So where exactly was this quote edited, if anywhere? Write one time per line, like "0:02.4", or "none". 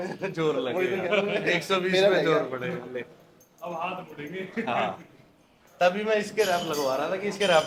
none

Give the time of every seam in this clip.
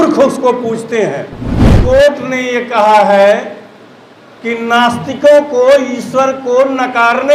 0:01.8

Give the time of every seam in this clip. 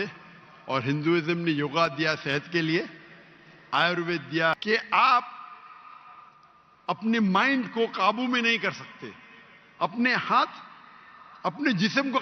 0:04.6

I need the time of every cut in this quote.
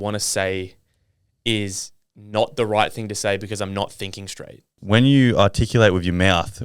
0:04.7

